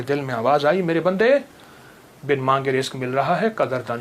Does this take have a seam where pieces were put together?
no; 0 cuts

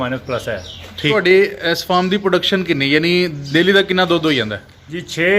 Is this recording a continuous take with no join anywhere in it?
no; 1 cut; at 1.1 s

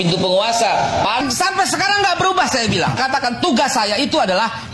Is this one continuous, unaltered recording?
no; 1 cut; at 1.2 s

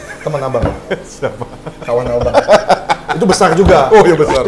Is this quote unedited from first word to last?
yes; 0 cuts

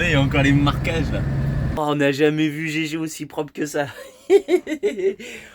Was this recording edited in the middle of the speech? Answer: yes; 1 cut; at 1.6 s

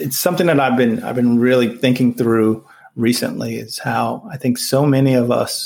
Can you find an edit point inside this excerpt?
no; 0 cuts

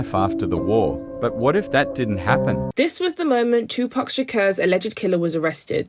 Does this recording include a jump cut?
yes; 1 cut; at 2.8 s

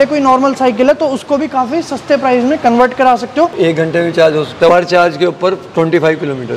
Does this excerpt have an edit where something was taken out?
yes; 2 cuts; at 3.5 s, 4.7 s

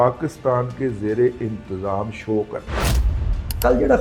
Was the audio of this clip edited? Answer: yes; 1 cut; at 3.0 s

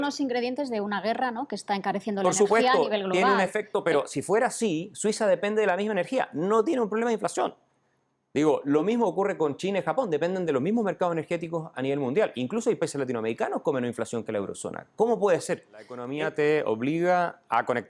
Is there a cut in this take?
yes; 1 cut; at 16.0 s

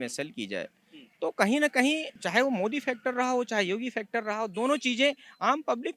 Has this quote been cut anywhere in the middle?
yes; 1 cut; at 2.1 s

